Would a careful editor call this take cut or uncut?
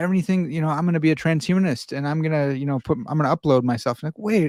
uncut